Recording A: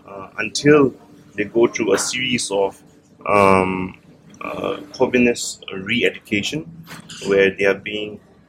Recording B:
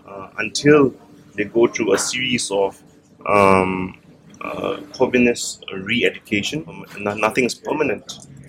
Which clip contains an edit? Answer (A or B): B